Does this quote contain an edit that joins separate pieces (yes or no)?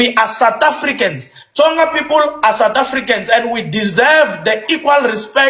no